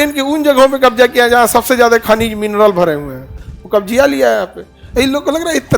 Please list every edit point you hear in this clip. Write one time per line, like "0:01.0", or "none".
none